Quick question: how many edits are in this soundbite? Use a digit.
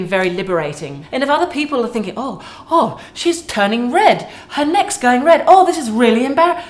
1